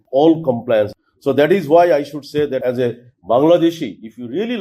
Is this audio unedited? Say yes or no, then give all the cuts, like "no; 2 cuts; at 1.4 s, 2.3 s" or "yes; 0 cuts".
no; 2 cuts; at 0.9 s, 2.6 s